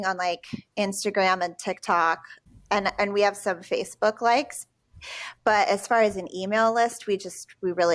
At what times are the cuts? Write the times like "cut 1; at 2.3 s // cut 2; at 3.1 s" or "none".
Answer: cut 1; at 2.3 s